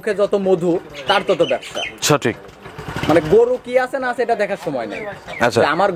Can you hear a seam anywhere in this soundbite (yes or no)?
no